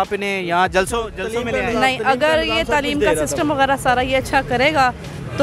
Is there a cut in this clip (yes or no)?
no